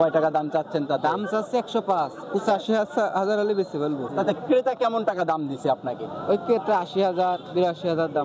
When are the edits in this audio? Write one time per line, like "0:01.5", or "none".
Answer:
0:04.0